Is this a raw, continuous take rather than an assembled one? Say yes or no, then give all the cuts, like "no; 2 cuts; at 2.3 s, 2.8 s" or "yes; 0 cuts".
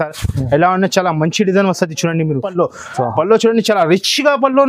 no; 1 cut; at 2.5 s